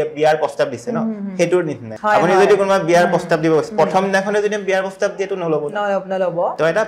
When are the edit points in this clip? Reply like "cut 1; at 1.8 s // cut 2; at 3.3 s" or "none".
cut 1; at 1.9 s

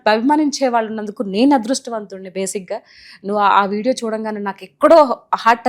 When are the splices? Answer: none

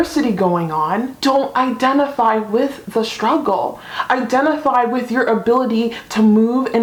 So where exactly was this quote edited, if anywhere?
none

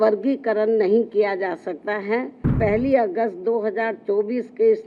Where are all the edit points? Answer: cut 1; at 2.5 s

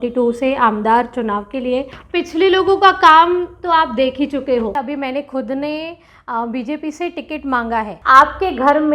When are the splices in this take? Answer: cut 1; at 2.0 s // cut 2; at 4.7 s // cut 3; at 7.9 s

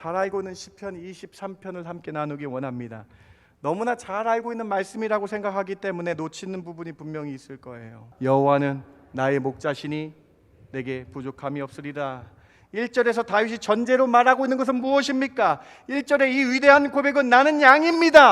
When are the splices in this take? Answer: cut 1; at 8.0 s

